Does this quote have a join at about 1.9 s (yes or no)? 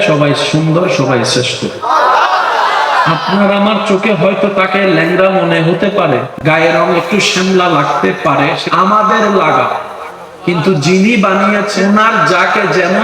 yes